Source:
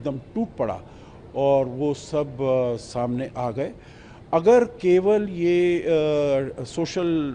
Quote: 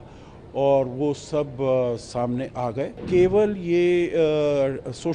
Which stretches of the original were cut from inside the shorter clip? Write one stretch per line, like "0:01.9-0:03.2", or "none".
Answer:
0:03.8-0:04.7

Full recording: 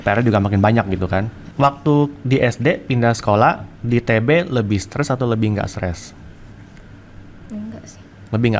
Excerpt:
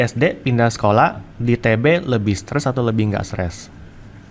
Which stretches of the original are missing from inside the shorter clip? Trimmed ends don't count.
none

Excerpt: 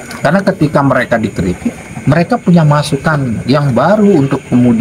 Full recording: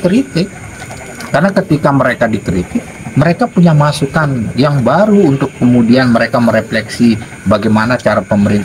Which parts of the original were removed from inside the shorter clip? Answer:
none

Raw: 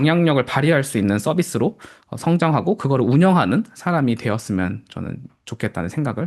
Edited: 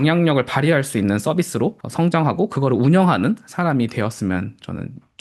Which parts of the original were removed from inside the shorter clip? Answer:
0:01.8-0:02.1

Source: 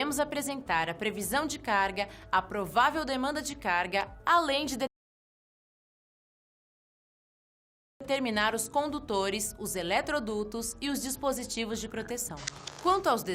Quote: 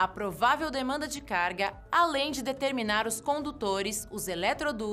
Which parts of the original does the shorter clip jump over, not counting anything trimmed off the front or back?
0:04.9-0:08.0

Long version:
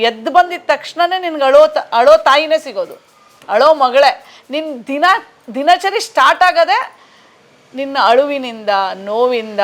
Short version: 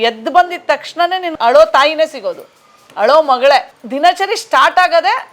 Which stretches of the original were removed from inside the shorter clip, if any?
0:01.3-0:01.8
0:04.3-0:05.4

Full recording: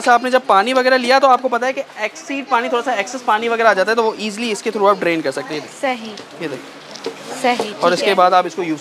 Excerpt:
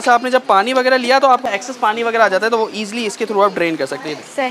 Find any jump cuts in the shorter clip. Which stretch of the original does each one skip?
0:01.4-0:02.9

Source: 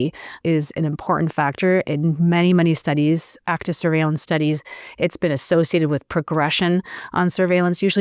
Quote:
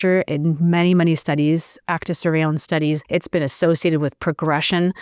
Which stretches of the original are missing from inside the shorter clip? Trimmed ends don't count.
0:04.6-0:04.9

